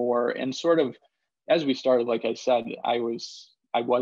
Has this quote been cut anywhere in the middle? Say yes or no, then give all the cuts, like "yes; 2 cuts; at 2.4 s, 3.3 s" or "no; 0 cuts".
no; 0 cuts